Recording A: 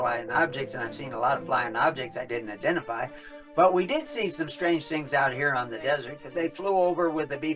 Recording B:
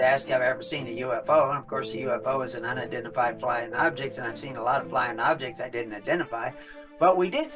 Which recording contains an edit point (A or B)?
A